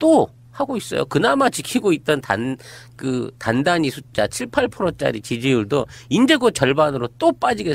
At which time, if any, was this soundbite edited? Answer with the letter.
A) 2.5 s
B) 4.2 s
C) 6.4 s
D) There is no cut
A